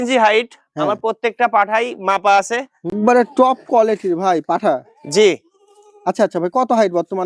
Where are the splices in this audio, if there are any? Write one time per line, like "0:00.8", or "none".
0:03.0